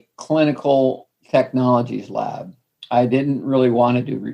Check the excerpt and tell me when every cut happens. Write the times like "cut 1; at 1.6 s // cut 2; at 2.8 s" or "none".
cut 1; at 1.1 s